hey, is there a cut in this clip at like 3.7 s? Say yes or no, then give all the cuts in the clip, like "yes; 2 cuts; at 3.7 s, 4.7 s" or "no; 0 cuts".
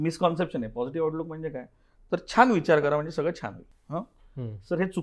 yes; 1 cut; at 3.7 s